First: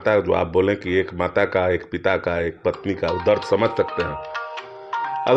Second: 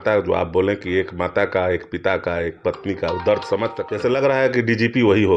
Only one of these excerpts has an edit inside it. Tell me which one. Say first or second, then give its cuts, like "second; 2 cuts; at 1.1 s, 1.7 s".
second; 1 cut; at 3.8 s